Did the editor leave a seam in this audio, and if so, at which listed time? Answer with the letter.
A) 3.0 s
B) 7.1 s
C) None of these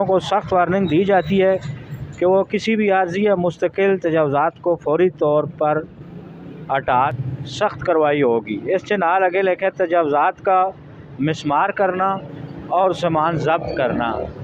B